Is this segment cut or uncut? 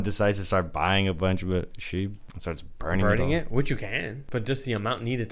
cut